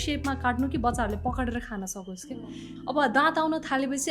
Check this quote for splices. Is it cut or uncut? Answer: cut